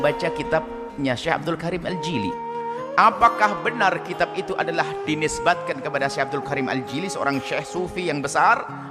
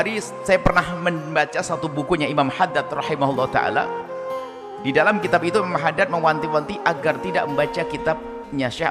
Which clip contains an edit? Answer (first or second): first